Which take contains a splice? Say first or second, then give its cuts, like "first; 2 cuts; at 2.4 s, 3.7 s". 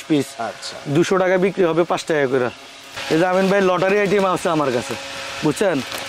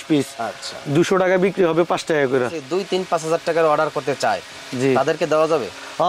second; 1 cut; at 2.6 s